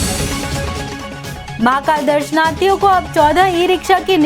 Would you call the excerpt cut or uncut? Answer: cut